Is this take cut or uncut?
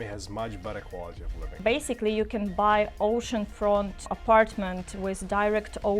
cut